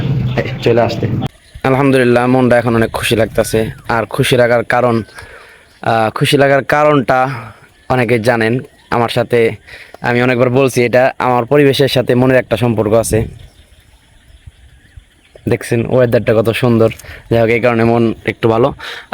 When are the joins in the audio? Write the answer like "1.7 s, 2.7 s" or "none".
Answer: none